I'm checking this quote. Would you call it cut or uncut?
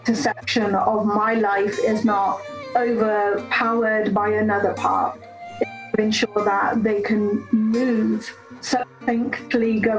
uncut